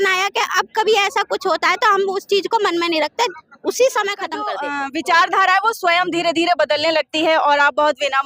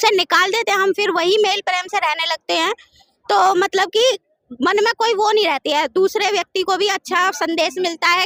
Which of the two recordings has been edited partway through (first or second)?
first